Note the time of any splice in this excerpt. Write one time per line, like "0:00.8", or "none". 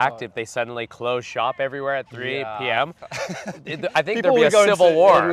none